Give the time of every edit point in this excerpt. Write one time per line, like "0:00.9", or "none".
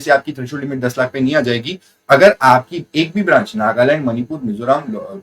none